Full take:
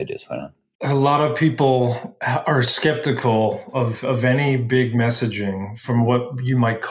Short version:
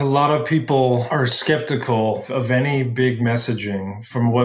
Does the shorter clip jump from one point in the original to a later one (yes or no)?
yes